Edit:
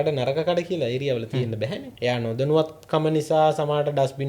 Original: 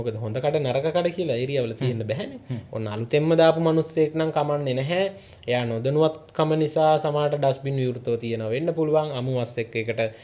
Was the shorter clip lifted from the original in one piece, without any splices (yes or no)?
no